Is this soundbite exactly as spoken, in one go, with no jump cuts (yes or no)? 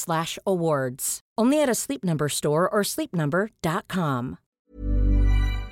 no